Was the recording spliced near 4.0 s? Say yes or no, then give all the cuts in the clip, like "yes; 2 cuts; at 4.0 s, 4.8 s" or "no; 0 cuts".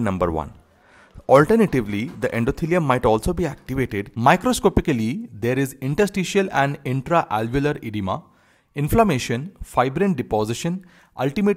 yes; 1 cut; at 4.0 s